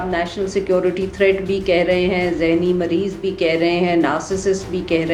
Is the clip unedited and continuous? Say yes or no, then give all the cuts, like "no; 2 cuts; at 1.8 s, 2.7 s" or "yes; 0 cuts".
yes; 0 cuts